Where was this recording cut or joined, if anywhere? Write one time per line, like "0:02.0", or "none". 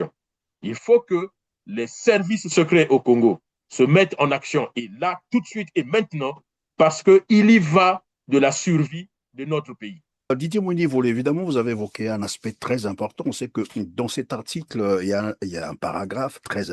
0:10.3